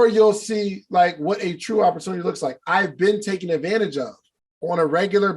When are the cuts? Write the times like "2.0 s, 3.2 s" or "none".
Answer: none